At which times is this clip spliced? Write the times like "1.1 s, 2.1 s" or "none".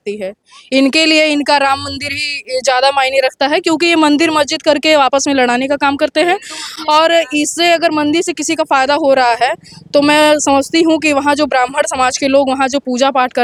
none